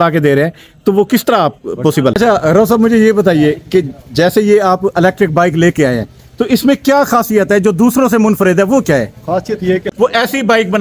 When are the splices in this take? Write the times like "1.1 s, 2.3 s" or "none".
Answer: 2.1 s, 9.9 s